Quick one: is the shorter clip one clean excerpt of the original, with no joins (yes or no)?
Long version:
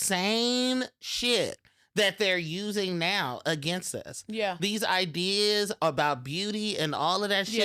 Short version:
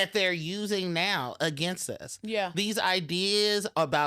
yes